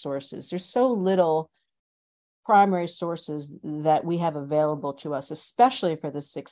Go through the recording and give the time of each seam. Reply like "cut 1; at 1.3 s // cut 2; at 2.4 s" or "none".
none